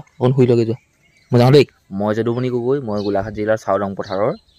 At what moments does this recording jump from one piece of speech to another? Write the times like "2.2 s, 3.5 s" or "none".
1.8 s